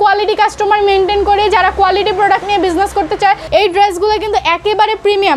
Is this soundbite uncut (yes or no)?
no